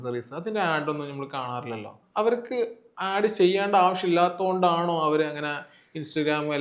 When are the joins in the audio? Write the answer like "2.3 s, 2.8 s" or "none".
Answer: 2.0 s

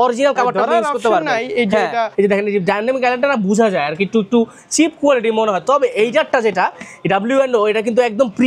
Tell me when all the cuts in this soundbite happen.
2.1 s

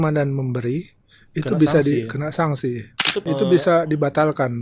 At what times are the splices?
3.2 s

